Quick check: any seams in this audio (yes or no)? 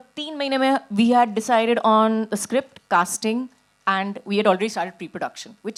no